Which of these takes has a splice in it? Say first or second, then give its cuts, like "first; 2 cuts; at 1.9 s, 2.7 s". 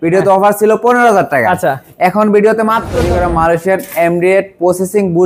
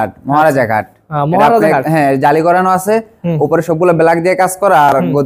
first; 1 cut; at 3.0 s